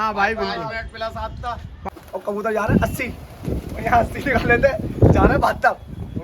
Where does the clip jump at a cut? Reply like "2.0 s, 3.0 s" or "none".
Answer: 1.7 s